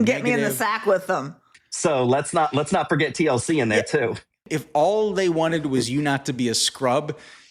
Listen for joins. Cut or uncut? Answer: cut